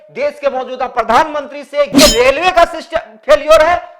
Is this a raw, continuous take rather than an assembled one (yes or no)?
no